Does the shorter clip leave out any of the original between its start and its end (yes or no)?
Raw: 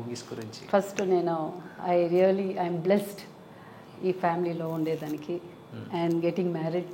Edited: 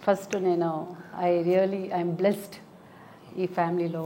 no